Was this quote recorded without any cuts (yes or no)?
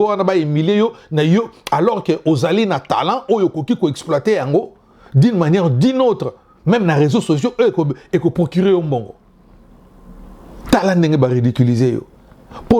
yes